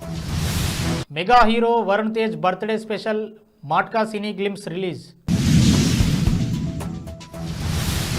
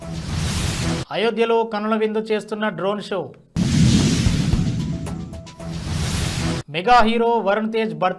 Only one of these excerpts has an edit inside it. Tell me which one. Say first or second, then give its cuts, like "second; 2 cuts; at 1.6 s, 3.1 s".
second; 3 cuts; at 1.2 s, 3.6 s, 6.2 s